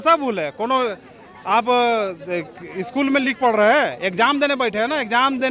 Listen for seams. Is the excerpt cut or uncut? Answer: uncut